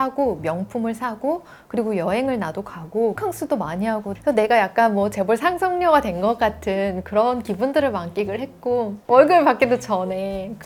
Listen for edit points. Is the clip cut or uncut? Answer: uncut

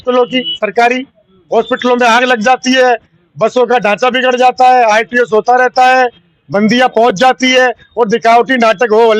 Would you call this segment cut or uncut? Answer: uncut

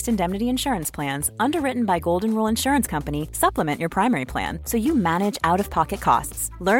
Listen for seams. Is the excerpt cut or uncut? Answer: uncut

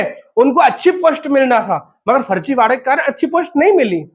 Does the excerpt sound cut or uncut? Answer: uncut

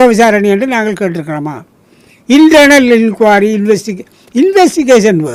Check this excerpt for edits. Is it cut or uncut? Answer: uncut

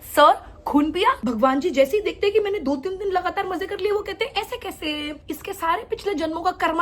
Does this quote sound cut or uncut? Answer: cut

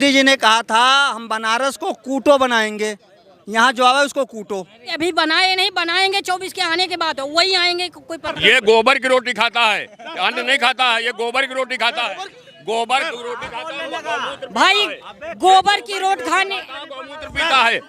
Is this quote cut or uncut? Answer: cut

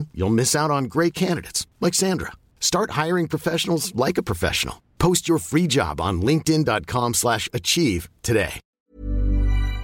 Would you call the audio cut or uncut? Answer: cut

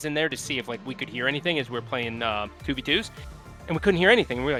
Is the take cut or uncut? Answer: uncut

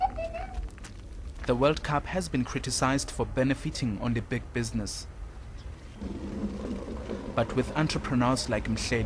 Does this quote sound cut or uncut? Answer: cut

